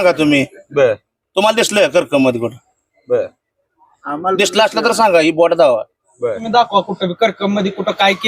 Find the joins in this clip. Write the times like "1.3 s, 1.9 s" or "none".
6.4 s